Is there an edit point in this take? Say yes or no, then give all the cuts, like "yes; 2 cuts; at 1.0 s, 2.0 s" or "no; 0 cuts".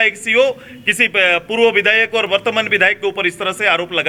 no; 0 cuts